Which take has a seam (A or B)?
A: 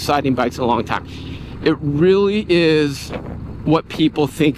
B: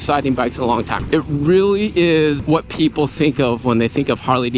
B